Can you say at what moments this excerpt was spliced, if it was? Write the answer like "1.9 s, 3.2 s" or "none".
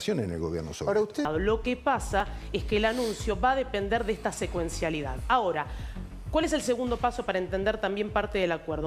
1.2 s